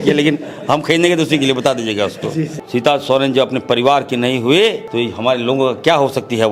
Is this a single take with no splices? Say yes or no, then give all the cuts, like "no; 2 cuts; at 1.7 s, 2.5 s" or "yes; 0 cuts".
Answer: no; 2 cuts; at 2.6 s, 4.8 s